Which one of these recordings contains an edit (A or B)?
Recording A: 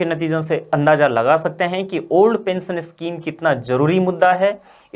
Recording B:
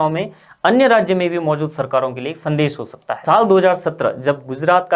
B